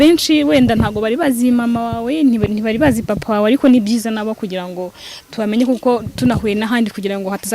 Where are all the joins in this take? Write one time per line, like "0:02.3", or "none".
none